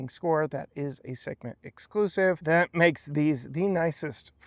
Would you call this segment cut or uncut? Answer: cut